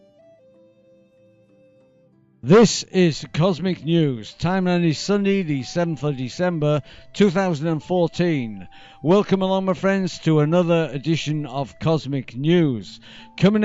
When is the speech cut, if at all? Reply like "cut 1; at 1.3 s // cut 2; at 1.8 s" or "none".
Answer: none